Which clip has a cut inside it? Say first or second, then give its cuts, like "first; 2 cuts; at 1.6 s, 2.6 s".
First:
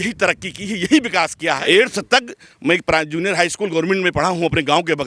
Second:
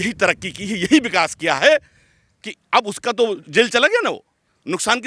first; 1 cut; at 1.6 s